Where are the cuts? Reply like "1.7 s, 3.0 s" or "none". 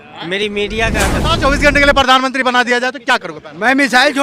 1.4 s